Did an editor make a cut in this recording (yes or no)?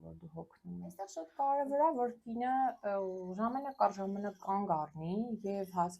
yes